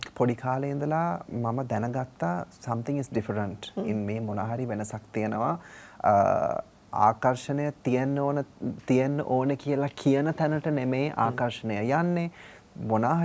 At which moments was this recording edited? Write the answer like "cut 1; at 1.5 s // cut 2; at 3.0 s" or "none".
none